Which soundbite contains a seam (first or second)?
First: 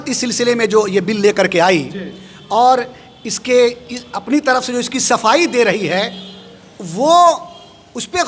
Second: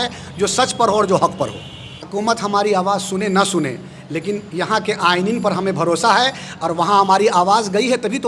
second